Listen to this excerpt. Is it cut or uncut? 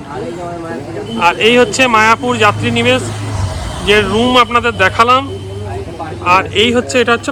uncut